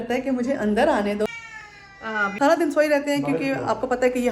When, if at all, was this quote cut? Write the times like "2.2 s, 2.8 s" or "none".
1.9 s